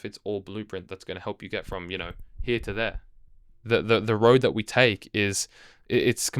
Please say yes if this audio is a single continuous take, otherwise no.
yes